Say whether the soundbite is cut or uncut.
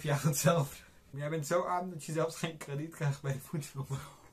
cut